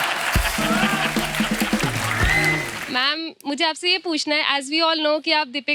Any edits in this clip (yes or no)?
yes